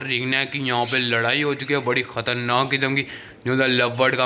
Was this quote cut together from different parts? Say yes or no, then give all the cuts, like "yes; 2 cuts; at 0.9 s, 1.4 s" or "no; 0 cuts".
no; 0 cuts